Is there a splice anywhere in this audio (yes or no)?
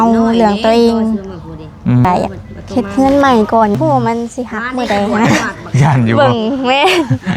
yes